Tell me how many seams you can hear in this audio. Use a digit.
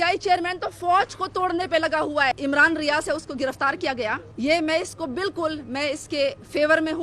2